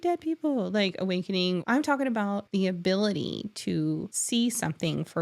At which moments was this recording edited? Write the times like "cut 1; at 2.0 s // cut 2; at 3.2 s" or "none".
cut 1; at 1.6 s // cut 2; at 2.4 s // cut 3; at 4.1 s